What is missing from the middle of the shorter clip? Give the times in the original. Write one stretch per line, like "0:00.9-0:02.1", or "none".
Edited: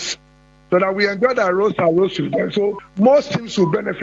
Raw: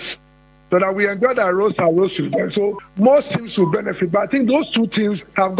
none

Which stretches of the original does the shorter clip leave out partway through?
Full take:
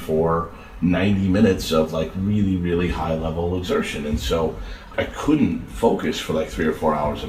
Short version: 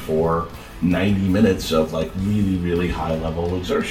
none

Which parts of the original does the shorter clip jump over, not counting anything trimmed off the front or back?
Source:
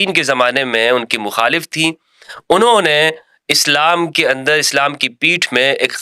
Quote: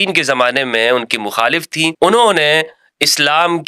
0:01.9-0:02.4

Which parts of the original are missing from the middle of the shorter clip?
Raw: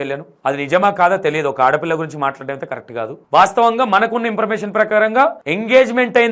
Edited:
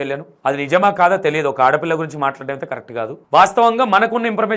none

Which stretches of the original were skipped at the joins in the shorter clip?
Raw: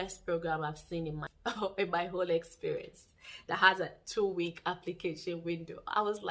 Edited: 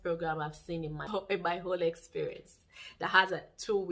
0:01.3-0:01.6

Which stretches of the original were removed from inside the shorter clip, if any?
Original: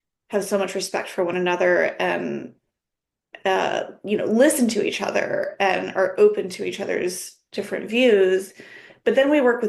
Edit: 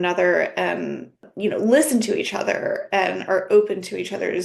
0:02.7-0:03.9

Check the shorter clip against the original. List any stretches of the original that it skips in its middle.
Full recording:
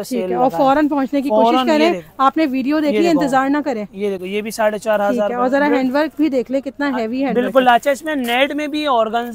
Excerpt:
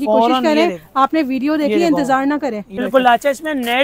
0:04.0-0:07.4

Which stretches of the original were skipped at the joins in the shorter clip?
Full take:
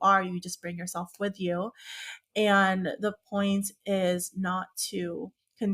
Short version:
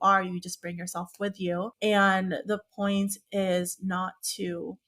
0:01.7-0:02.3

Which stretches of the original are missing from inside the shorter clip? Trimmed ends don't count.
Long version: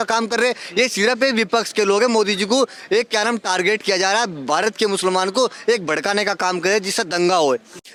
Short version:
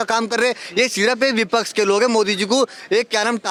none

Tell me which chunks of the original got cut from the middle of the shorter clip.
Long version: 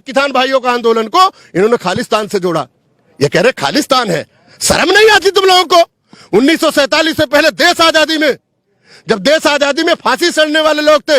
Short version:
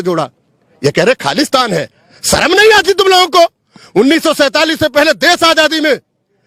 none

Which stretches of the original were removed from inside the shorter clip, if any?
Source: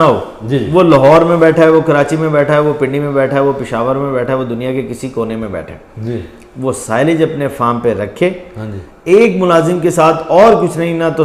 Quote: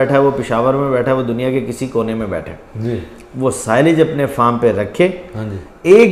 none

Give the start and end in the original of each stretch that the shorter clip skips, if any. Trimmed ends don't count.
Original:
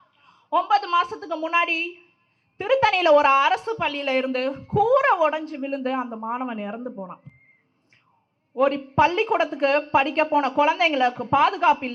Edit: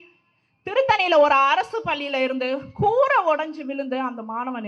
none

